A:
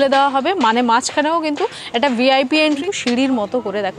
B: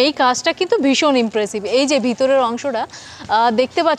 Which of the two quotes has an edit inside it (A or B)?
A